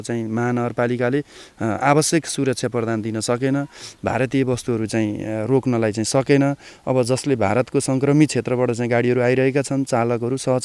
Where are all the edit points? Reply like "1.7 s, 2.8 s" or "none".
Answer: none